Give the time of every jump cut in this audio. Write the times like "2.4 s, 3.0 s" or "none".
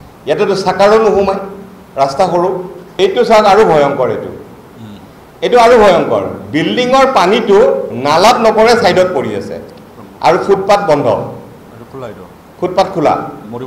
2.8 s